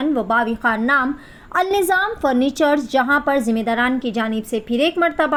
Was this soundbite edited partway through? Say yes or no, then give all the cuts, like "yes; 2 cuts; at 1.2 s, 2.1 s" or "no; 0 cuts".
no; 0 cuts